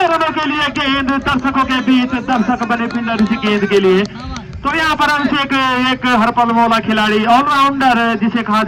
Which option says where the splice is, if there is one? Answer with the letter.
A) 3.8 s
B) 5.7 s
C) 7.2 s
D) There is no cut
D